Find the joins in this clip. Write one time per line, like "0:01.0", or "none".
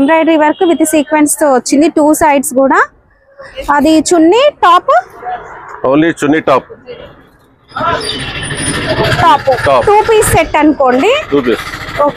none